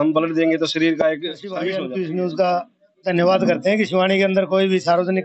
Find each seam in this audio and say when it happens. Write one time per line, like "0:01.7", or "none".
0:01.7